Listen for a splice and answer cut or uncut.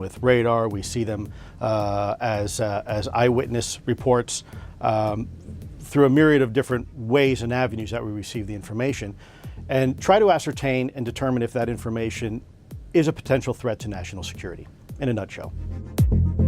uncut